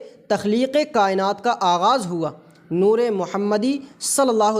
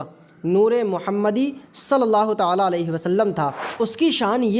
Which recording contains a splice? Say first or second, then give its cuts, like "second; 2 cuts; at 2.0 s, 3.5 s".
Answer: second; 1 cut; at 3.6 s